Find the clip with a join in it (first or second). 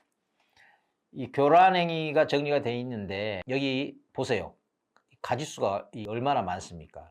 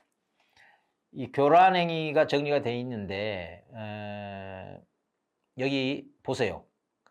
first